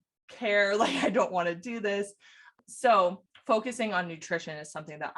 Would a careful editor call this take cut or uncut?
cut